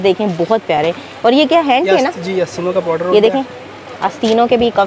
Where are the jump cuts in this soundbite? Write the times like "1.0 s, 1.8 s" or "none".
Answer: none

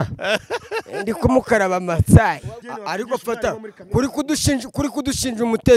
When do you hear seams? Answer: 2.6 s

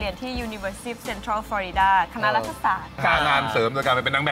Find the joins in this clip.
3.0 s

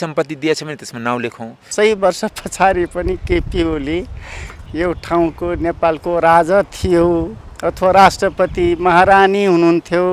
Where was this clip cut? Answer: 1.7 s

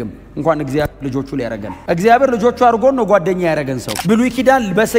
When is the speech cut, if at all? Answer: 3.9 s

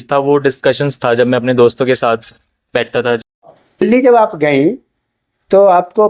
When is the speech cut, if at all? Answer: 3.5 s

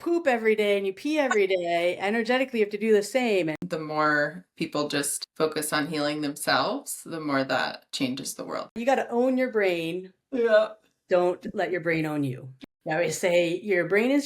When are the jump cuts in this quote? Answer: 3.6 s, 8.8 s, 12.5 s

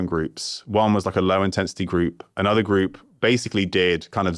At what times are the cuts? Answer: none

